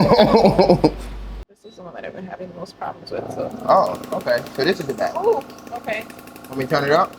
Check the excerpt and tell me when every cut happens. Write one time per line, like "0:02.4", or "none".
0:01.7